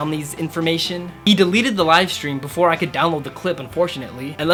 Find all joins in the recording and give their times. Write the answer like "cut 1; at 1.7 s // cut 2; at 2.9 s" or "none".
none

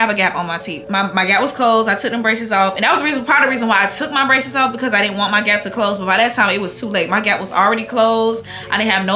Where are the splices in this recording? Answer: none

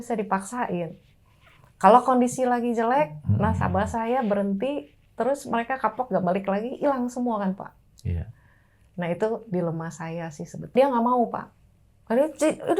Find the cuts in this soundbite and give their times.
cut 1; at 10.7 s

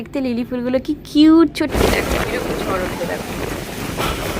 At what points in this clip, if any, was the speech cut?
cut 1; at 1.7 s

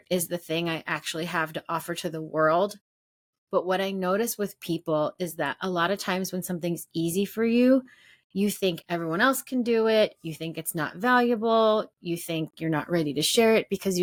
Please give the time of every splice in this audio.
none

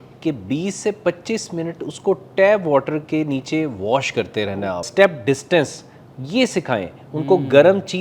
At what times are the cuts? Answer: cut 1; at 4.9 s

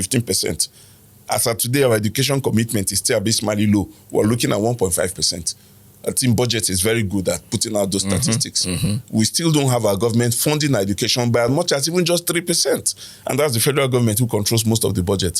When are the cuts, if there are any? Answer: none

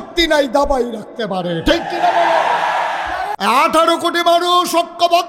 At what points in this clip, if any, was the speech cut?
cut 1; at 3.3 s

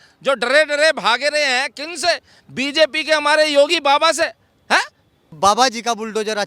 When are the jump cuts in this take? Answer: cut 1; at 5.3 s

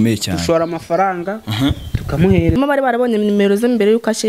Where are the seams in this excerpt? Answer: cut 1; at 2.6 s

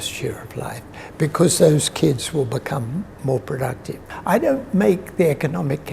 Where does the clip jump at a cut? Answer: cut 1; at 4.1 s

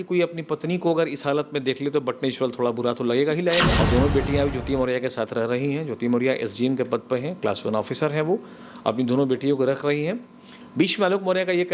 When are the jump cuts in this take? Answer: cut 1; at 3.7 s

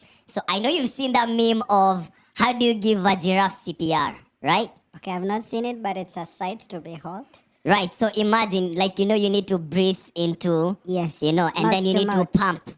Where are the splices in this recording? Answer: none

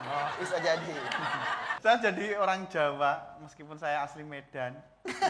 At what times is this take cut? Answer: cut 1; at 1.7 s

